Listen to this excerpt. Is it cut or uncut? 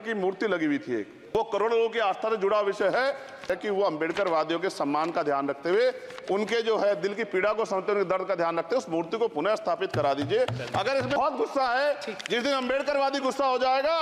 cut